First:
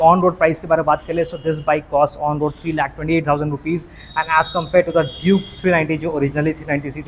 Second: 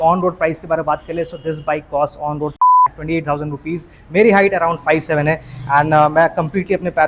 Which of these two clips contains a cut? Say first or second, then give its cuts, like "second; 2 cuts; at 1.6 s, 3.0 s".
second; 1 cut; at 3.9 s